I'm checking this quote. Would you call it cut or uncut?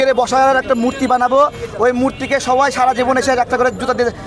uncut